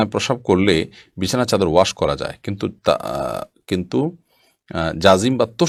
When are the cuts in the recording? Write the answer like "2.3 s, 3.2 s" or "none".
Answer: none